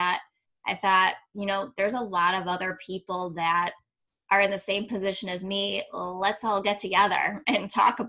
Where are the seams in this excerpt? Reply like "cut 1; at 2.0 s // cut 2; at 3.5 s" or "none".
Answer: none